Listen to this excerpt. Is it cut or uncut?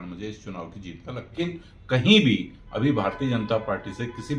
cut